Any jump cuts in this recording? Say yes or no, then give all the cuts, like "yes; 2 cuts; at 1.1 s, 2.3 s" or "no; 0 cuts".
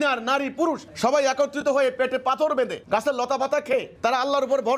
yes; 3 cuts; at 0.9 s, 2.8 s, 3.9 s